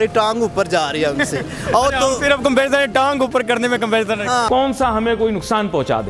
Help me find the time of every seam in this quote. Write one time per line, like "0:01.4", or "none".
0:04.5